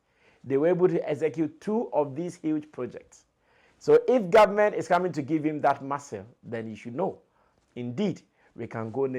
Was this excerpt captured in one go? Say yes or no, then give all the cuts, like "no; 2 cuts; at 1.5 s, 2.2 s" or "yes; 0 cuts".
yes; 0 cuts